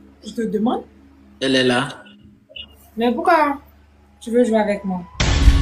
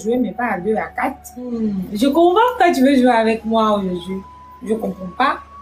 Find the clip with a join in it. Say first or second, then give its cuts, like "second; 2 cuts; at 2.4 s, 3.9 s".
second; 1 cut; at 1.5 s